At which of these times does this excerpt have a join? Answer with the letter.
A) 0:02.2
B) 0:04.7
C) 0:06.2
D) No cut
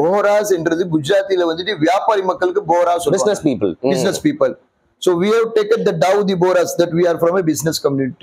D